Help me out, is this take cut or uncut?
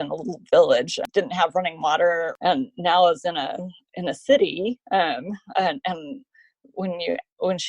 cut